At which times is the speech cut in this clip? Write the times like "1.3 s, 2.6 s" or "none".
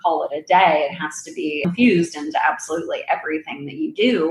1.6 s